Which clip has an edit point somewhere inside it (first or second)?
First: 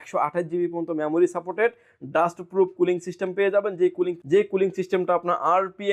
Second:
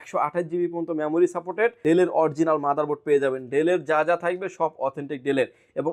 second